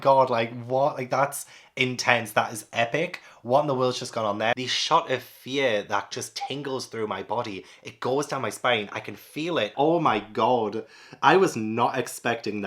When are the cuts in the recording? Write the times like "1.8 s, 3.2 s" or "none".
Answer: 4.5 s, 9.7 s